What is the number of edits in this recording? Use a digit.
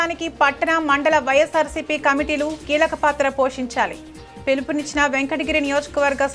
0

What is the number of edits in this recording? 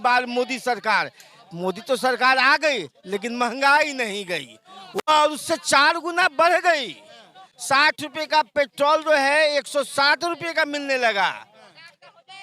0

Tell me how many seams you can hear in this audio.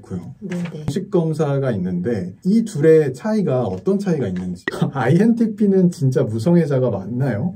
2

